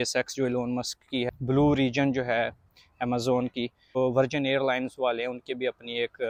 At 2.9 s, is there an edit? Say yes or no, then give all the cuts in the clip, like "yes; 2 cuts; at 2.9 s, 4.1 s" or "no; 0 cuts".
no; 0 cuts